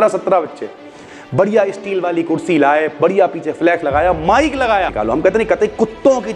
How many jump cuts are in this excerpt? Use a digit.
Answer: 1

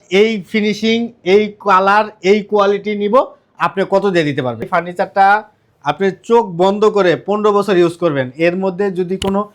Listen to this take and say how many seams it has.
1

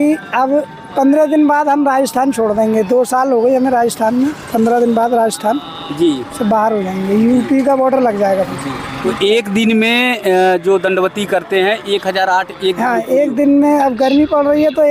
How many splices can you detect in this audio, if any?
0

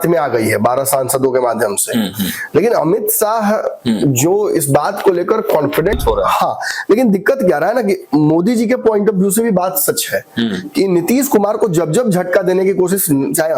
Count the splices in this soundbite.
1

